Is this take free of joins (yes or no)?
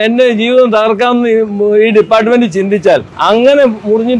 no